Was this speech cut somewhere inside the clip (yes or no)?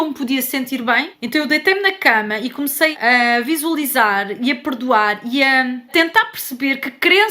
yes